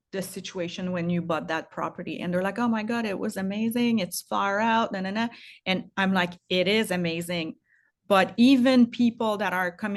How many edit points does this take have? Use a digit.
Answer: 0